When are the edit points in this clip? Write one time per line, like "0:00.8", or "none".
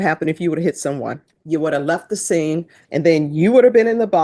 0:01.3
0:02.8